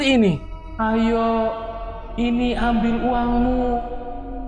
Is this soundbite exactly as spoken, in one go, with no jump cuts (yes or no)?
yes